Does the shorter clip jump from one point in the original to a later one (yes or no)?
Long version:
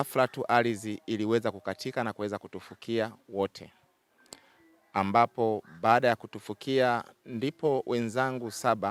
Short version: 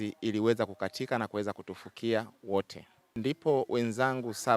yes